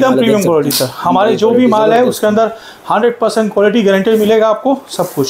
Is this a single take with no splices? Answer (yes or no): yes